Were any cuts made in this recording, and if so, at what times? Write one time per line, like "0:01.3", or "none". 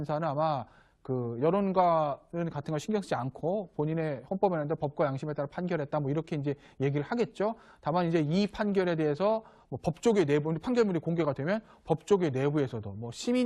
0:05.5